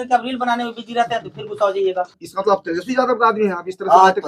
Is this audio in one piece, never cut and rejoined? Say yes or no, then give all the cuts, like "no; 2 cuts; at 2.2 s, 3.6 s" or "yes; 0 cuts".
no; 1 cut; at 2.2 s